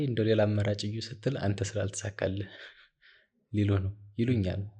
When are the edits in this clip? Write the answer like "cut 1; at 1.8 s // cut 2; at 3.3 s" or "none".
none